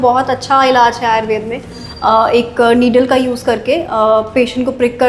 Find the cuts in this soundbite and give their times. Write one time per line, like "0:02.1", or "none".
0:01.8